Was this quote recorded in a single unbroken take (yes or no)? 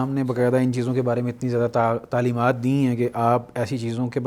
yes